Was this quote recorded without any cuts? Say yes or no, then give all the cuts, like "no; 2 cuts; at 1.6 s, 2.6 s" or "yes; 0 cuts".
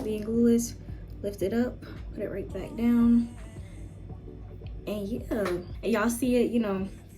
no; 1 cut; at 5.7 s